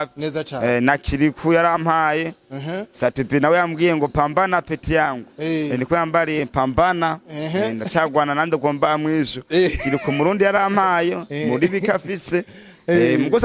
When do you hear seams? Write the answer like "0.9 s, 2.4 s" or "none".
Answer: none